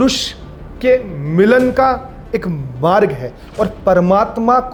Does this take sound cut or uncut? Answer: uncut